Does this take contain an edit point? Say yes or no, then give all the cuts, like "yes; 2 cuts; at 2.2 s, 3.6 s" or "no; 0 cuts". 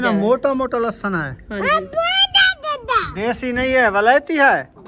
no; 0 cuts